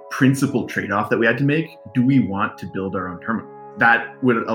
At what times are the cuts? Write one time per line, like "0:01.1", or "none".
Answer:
0:01.8
0:03.6